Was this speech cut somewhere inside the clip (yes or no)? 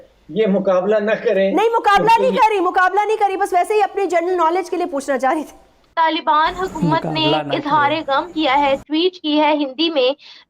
yes